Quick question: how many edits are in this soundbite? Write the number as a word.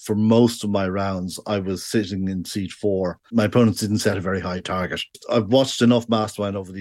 zero